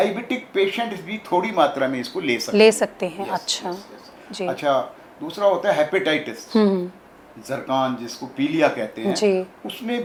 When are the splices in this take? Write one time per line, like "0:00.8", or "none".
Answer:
none